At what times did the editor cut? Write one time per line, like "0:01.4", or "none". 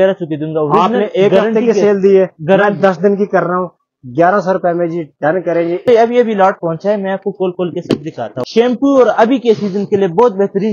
0:05.8
0:08.4